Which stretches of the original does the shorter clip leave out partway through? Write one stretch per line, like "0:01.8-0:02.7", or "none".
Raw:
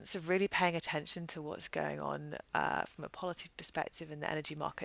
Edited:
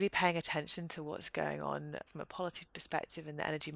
0:02.5-0:02.9